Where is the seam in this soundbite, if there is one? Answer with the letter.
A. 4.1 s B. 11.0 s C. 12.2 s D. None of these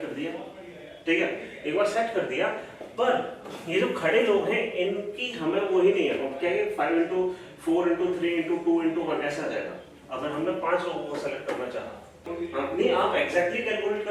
C